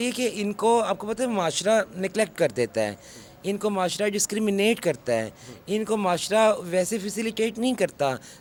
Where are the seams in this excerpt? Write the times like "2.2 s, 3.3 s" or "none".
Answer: none